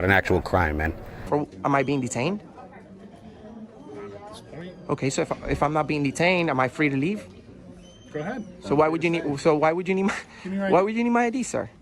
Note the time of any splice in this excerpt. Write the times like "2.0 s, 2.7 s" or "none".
1.1 s